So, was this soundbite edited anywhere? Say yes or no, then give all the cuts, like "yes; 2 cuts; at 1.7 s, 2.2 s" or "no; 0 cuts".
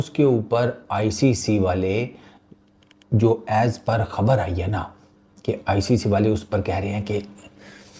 no; 0 cuts